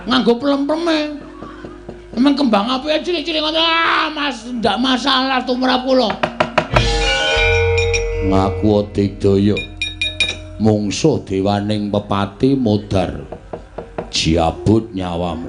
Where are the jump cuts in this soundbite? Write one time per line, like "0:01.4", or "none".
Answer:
0:06.8